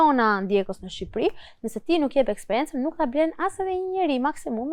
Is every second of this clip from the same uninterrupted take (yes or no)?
yes